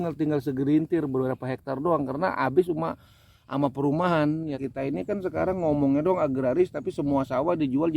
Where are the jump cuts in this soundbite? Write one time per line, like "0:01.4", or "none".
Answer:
0:04.6